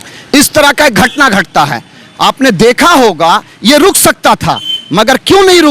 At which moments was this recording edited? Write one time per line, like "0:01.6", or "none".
none